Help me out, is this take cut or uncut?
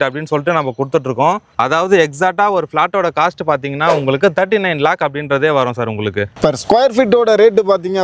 uncut